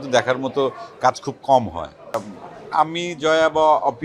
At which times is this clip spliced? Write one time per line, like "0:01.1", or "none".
0:02.4